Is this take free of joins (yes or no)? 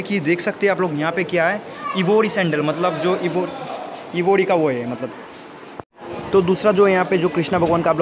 yes